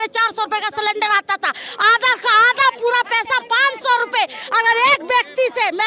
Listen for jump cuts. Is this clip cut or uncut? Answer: uncut